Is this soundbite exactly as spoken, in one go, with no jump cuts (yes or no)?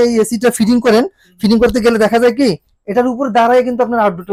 yes